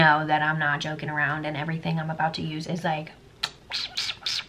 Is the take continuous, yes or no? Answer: yes